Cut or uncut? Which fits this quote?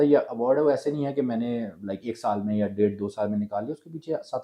uncut